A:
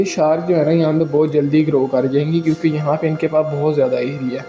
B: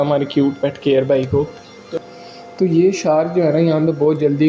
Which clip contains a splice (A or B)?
B